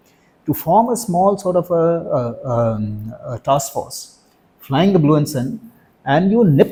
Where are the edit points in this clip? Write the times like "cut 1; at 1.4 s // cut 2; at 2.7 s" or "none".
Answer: none